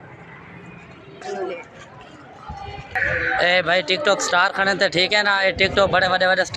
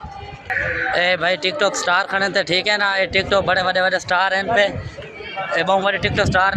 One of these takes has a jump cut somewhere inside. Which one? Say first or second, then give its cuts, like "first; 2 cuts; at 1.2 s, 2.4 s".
first; 1 cut; at 1.1 s